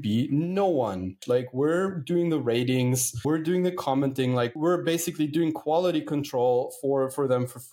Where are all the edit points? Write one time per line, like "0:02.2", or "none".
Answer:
0:01.2
0:03.2
0:04.5